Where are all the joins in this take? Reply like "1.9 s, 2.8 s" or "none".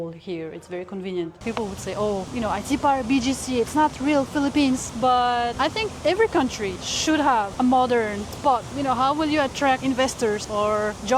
1.4 s, 2.3 s, 5.2 s, 6.9 s, 7.5 s, 8.7 s, 10.1 s